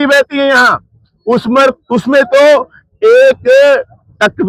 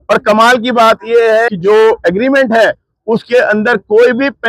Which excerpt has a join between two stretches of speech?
second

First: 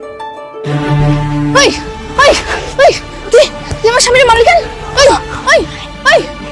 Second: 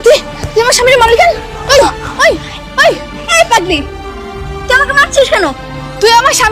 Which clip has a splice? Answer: first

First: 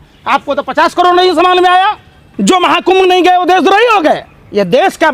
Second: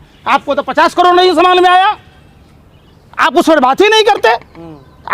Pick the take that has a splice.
first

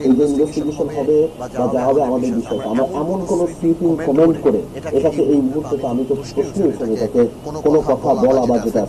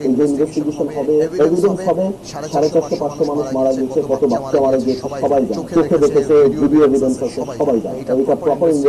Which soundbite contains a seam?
second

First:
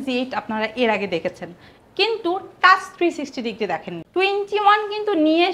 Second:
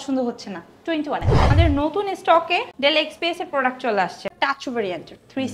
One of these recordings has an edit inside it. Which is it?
second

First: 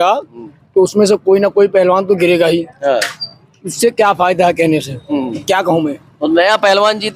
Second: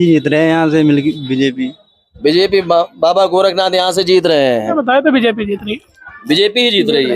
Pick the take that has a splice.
second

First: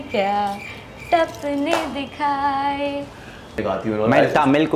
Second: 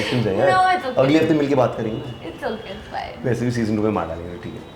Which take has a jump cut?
first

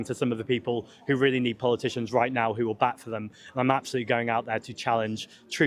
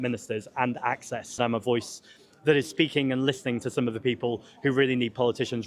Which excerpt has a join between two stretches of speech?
second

